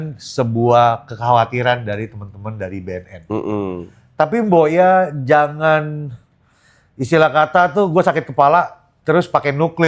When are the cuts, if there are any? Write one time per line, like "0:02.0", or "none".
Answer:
none